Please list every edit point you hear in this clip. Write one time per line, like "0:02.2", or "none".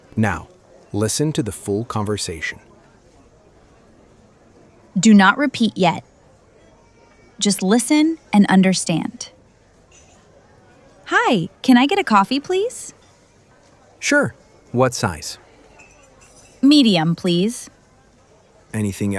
0:09.3
0:10.7
0:15.3
0:16.6